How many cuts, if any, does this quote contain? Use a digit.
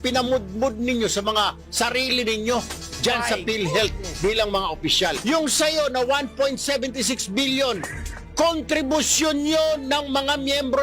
1